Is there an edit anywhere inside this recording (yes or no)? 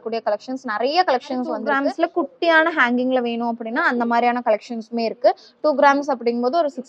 yes